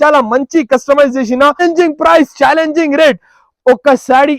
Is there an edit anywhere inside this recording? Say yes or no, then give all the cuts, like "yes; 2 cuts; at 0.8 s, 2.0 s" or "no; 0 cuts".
yes; 1 cut; at 1.6 s